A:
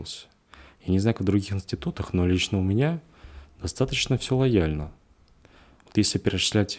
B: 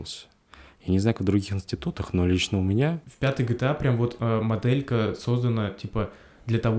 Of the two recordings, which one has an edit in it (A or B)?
B